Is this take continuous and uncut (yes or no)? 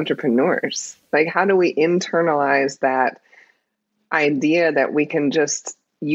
yes